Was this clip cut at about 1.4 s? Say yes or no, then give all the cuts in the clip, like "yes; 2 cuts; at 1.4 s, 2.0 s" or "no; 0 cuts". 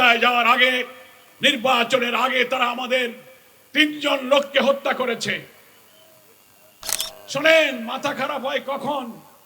no; 1 cut; at 6.8 s